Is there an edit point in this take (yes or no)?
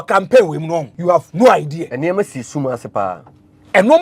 yes